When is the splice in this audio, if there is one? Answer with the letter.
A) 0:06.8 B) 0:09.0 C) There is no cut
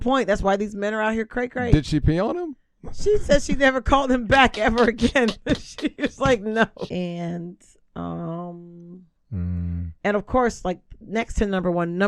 A